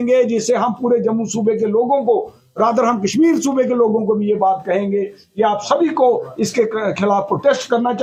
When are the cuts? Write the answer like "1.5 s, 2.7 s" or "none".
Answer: none